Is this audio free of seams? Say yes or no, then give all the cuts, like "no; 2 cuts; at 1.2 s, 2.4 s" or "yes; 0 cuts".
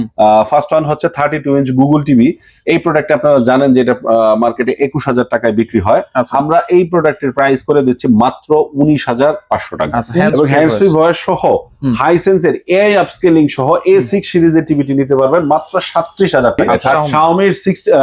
no; 2 cuts; at 10.2 s, 17.0 s